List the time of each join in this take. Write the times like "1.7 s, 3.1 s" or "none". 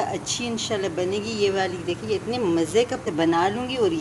3.0 s

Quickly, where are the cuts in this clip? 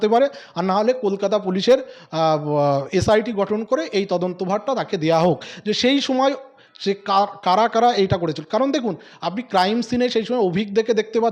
none

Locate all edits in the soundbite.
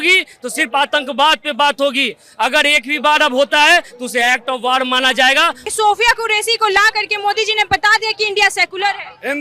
5.6 s

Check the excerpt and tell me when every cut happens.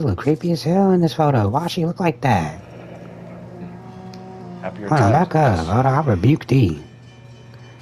none

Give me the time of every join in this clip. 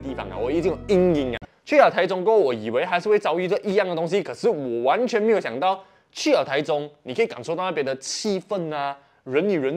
1.4 s

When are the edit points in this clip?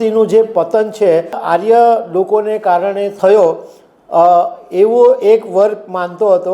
1.4 s, 3.1 s

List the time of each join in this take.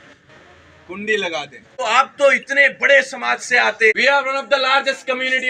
1.6 s, 3.9 s

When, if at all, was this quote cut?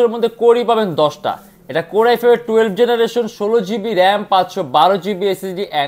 none

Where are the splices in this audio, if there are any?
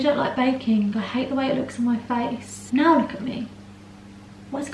2.5 s

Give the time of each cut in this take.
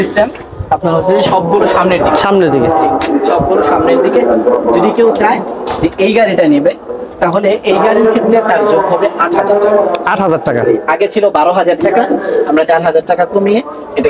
none

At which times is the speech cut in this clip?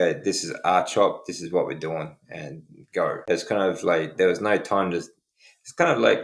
3.2 s

